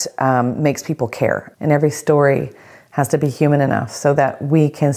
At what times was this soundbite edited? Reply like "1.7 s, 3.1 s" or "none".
1.5 s

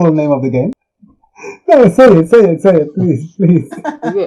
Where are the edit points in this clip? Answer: 1.4 s

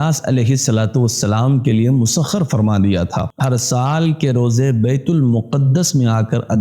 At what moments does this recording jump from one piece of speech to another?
3.3 s

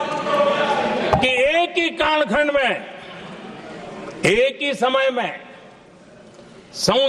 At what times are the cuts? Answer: none

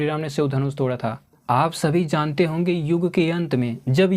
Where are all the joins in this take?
1.3 s

